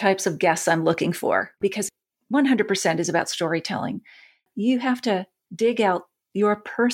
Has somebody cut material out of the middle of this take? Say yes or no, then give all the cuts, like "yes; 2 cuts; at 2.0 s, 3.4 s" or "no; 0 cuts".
yes; 3 cuts; at 1.5 s, 4.4 s, 5.4 s